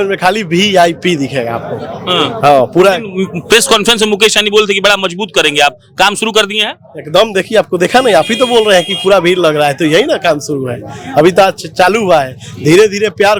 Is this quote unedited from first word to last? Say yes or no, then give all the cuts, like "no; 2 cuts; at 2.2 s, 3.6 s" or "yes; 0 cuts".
yes; 0 cuts